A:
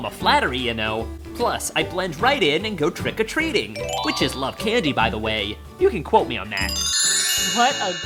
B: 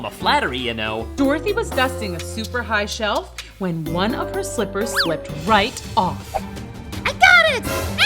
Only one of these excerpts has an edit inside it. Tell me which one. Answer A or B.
B